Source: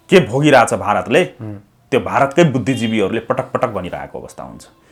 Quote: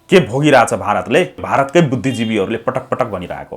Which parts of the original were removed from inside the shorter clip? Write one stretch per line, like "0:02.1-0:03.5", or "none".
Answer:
0:01.4-0:02.1